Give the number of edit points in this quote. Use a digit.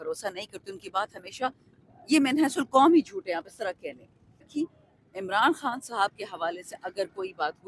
1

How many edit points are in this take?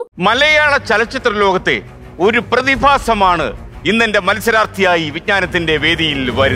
0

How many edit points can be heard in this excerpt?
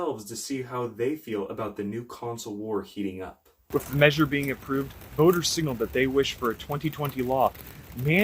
1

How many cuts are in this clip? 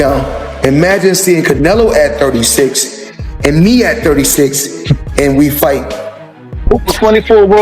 1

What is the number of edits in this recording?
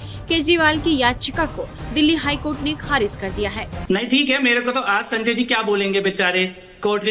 1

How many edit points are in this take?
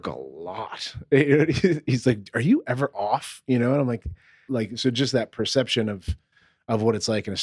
1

